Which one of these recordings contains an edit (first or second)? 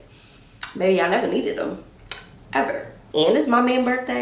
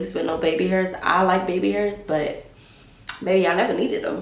first